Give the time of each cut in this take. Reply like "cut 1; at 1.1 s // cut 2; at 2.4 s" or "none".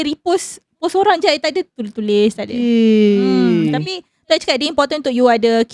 none